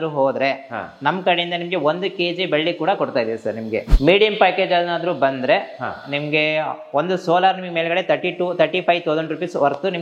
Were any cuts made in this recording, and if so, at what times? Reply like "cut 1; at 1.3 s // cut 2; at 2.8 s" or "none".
cut 1; at 3.9 s